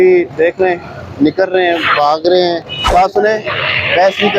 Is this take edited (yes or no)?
yes